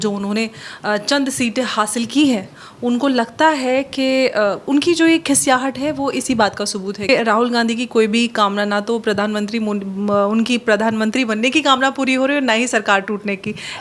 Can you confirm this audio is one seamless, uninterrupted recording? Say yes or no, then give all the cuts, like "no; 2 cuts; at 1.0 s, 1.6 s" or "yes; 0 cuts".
no; 1 cut; at 7.1 s